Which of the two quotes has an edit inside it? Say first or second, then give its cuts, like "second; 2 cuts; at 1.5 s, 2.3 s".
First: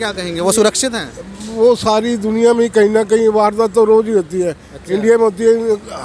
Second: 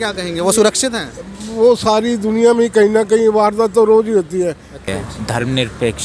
second; 1 cut; at 4.8 s